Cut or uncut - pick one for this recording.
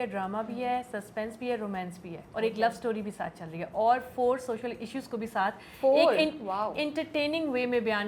uncut